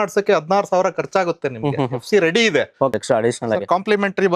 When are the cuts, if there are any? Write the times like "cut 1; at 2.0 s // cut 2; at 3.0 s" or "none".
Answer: cut 1; at 2.9 s